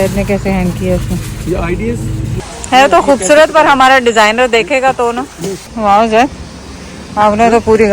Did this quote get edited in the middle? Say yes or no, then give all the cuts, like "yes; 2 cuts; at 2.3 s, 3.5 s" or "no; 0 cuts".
yes; 2 cuts; at 2.4 s, 5.7 s